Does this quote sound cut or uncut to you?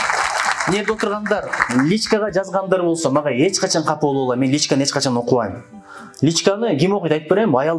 uncut